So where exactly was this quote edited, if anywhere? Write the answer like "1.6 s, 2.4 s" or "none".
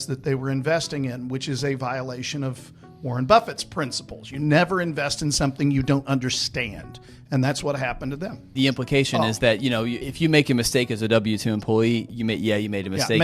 8.4 s, 10.0 s, 12.1 s